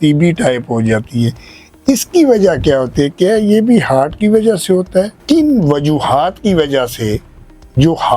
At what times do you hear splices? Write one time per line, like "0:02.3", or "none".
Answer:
0:05.2